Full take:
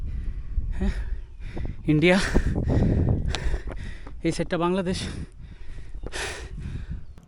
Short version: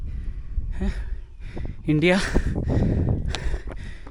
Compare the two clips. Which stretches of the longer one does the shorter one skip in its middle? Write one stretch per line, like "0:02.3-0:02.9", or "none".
none